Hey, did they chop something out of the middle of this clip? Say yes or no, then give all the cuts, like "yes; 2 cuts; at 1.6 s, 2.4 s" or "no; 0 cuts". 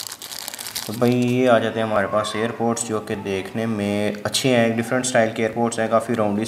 no; 0 cuts